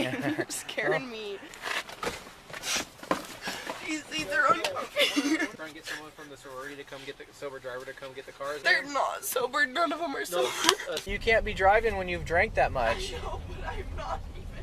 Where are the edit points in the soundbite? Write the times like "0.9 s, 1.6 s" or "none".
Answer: 1.5 s, 5.5 s, 8.6 s, 11.1 s